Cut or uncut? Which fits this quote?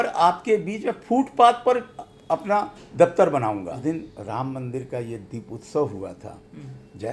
cut